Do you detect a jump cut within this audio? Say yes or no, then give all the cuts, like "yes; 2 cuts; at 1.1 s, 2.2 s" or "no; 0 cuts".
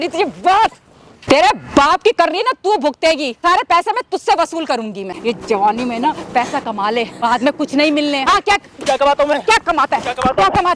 yes; 5 cuts; at 1.2 s, 3.4 s, 5.1 s, 7.2 s, 8.3 s